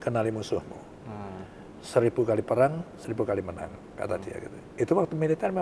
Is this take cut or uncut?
uncut